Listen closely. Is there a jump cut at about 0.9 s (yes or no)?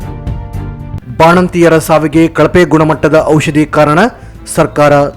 yes